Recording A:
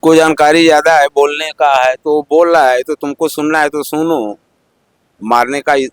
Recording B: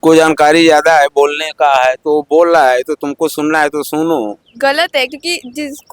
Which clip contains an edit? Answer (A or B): B